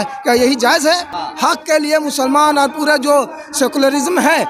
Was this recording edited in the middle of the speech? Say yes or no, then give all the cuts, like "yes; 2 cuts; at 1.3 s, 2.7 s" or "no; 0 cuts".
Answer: yes; 1 cut; at 1.2 s